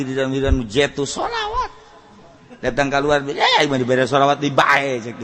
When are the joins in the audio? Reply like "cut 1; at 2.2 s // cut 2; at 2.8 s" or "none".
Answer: none